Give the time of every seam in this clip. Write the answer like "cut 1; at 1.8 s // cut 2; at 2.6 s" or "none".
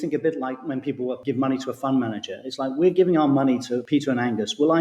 cut 1; at 1.2 s // cut 2; at 3.8 s